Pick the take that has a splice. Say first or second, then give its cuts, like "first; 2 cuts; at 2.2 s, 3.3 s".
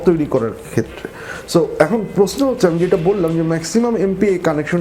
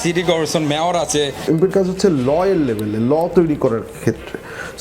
second; 1 cut; at 1.4 s